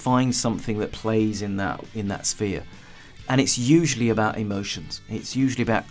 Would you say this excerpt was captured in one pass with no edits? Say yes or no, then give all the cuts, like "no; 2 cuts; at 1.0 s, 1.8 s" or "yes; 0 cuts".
no; 1 cut; at 1.0 s